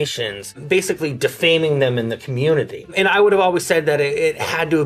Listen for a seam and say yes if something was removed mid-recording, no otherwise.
yes